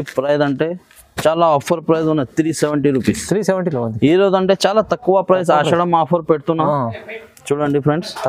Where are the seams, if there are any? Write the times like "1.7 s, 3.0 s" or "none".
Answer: none